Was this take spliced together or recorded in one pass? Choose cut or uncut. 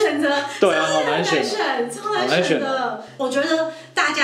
cut